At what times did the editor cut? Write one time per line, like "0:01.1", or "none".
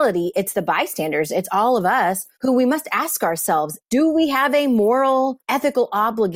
0:02.3
0:03.8
0:05.4